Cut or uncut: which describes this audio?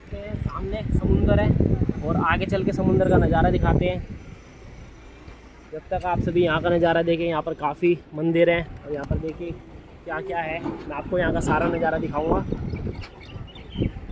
uncut